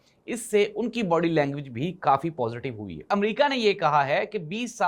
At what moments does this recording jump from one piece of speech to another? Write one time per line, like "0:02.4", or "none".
0:03.1